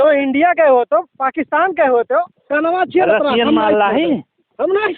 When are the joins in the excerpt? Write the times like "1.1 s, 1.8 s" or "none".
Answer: 2.4 s